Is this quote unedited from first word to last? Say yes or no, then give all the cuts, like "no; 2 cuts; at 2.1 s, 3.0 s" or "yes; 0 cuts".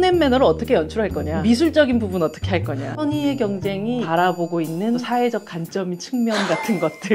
no; 4 cuts; at 1.3 s, 2.9 s, 4.1 s, 5.0 s